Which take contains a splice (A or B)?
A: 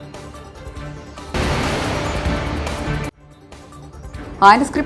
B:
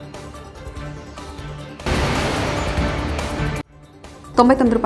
B